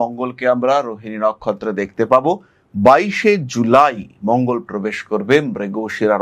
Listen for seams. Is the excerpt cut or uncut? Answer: uncut